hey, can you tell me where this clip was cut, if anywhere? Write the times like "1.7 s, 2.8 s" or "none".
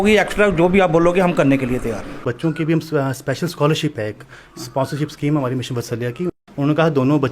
2.2 s, 6.4 s